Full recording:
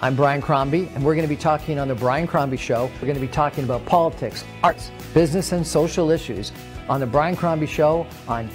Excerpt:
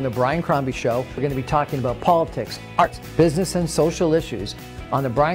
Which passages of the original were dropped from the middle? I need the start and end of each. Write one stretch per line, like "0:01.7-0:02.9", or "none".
0:04.9-0:05.0